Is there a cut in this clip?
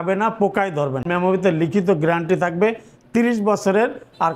yes; 1 cut; at 1.1 s

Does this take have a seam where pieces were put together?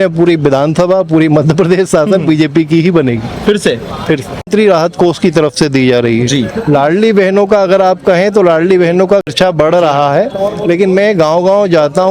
yes; 2 cuts; at 4.5 s, 9.3 s

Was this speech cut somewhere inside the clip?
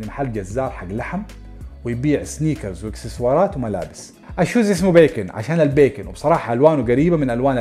no; 0 cuts

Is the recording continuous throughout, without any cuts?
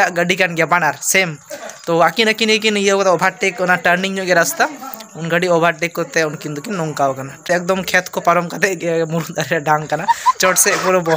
no; 1 cut; at 7.4 s

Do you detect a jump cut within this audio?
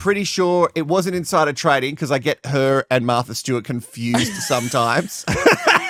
no; 0 cuts

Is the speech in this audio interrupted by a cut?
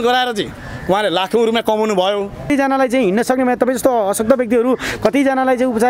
yes; 1 cut; at 2.5 s

